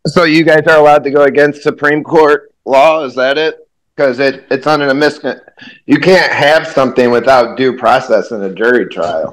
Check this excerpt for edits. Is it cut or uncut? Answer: uncut